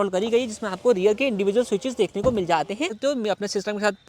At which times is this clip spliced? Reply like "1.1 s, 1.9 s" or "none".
2.9 s